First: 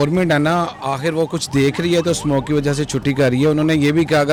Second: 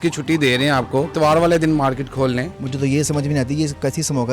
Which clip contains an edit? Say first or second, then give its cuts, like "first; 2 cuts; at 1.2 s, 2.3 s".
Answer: second; 2 cuts; at 1.1 s, 2.6 s